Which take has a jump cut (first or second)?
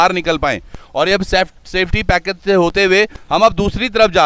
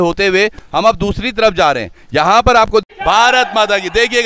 second